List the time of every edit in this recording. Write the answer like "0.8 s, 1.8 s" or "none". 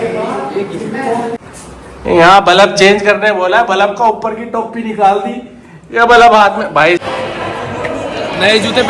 1.4 s, 7.0 s